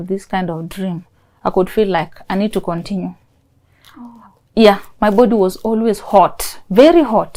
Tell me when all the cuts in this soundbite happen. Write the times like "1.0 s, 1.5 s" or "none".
none